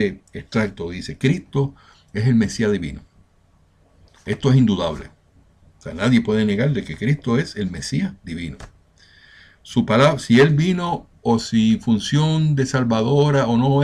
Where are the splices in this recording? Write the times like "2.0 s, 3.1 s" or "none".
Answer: 12.3 s